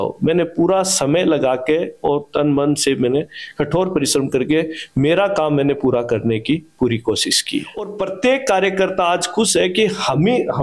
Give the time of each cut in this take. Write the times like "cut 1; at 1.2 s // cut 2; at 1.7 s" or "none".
cut 1; at 7.8 s